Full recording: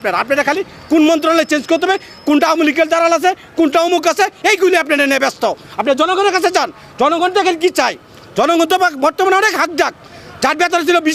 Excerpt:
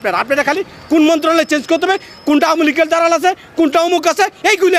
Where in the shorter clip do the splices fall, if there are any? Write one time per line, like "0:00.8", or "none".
none